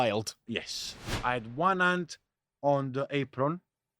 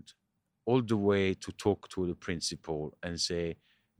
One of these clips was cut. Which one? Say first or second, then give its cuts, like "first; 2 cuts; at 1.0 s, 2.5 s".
first; 1 cut; at 1.1 s